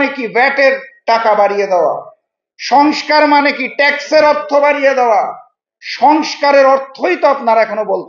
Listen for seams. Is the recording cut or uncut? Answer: uncut